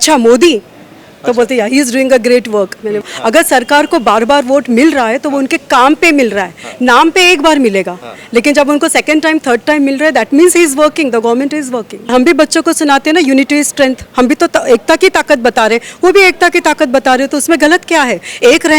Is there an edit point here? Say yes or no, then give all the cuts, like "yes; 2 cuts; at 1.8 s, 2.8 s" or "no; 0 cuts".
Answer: yes; 2 cuts; at 3.0 s, 12.1 s